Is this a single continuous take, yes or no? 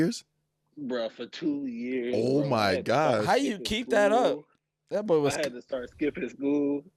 yes